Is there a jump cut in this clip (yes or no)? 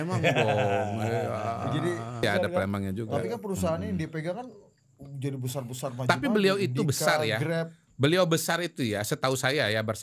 yes